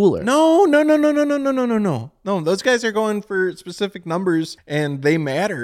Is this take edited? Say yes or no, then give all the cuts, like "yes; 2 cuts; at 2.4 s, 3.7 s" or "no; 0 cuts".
yes; 1 cut; at 4.6 s